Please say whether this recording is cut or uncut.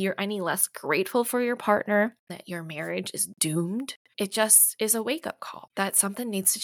cut